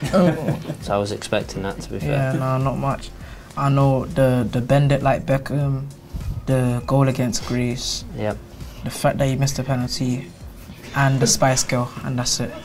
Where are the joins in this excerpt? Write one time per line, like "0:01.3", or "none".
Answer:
none